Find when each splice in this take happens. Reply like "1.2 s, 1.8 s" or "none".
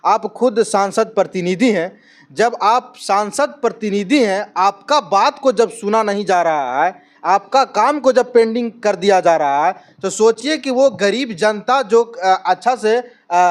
none